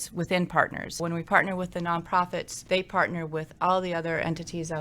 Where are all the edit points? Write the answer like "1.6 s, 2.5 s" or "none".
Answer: 1.0 s, 2.5 s